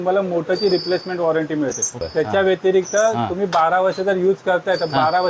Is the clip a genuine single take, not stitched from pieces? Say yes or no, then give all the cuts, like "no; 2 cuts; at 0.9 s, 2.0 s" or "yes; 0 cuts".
no; 1 cut; at 2.0 s